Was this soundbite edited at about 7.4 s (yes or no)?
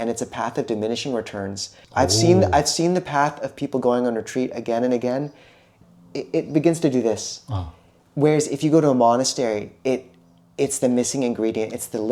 no